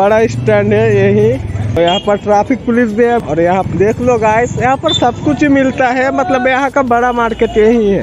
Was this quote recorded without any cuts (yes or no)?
no